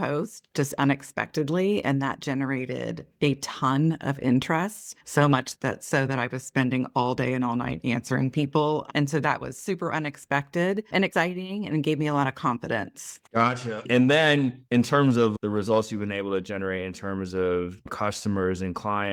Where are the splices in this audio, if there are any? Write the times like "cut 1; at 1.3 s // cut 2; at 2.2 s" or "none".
none